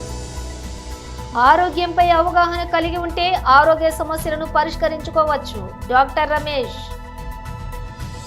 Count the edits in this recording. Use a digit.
1